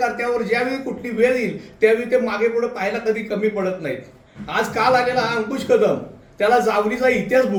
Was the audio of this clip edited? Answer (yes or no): no